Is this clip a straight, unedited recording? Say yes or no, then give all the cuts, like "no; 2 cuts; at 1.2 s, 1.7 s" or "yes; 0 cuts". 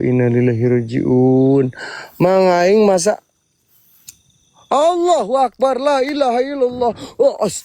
yes; 0 cuts